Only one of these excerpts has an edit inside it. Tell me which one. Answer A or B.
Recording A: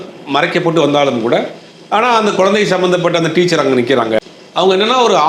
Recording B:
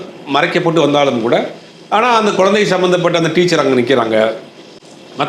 A